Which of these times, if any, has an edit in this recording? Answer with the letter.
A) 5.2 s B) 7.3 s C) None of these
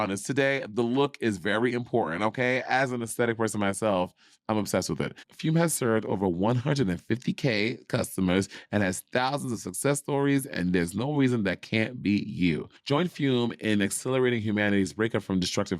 A